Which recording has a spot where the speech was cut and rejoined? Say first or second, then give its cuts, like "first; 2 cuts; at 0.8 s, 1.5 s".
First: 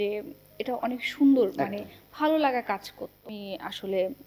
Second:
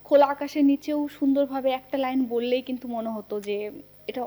first; 1 cut; at 3.3 s